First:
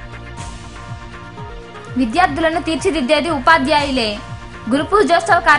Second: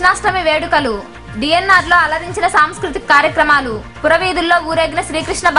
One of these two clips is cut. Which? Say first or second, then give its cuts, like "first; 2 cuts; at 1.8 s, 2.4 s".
first; 1 cut; at 1.0 s